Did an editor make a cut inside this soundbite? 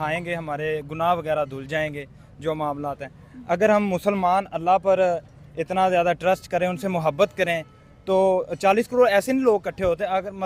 no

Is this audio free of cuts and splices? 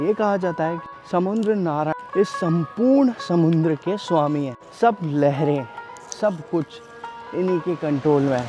no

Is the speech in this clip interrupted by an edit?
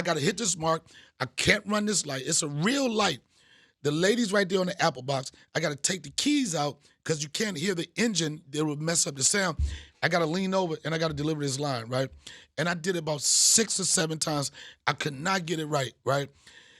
no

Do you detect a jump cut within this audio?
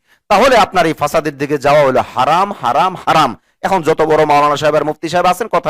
no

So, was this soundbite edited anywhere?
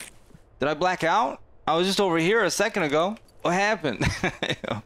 yes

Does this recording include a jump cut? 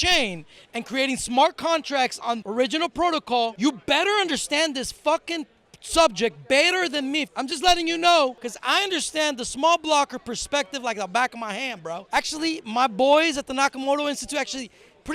yes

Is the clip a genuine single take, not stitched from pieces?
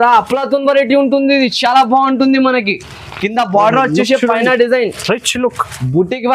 yes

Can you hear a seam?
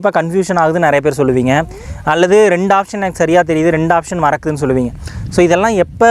no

